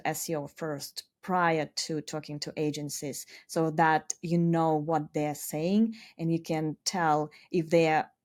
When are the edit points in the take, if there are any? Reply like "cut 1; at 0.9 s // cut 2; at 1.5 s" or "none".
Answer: none